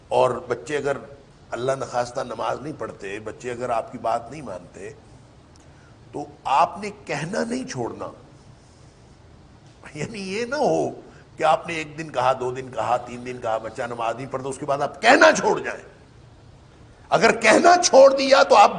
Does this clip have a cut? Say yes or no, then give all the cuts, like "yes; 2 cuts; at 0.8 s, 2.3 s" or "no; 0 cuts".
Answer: no; 0 cuts